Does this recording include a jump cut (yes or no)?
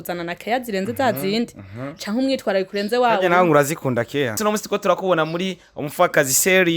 yes